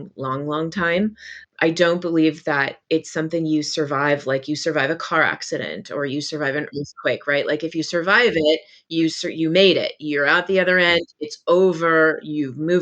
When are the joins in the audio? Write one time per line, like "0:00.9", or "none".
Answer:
0:01.4

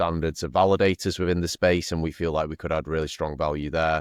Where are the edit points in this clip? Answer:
none

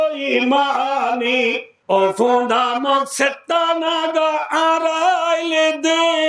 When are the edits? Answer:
0:01.7

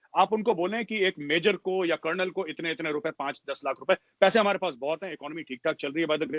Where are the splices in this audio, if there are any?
none

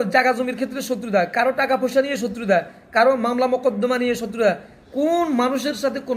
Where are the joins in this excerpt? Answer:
0:04.7

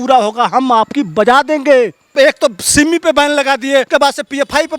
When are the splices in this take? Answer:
0:02.1
0:03.9

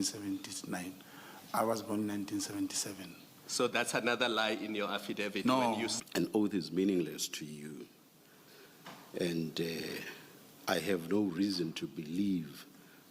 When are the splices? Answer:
0:06.0

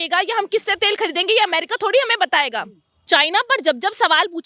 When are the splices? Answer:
0:03.0

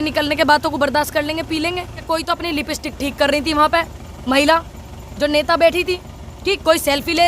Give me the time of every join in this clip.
0:02.0

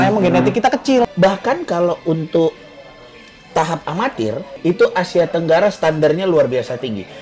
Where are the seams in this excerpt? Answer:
0:01.1
0:04.5

